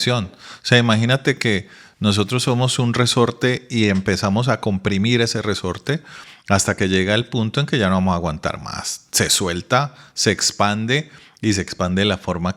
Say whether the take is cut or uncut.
uncut